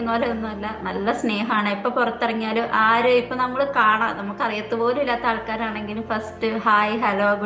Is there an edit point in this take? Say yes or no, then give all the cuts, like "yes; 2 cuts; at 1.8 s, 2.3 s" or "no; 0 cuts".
no; 0 cuts